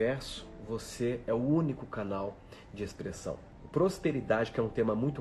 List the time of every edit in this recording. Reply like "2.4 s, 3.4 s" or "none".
3.5 s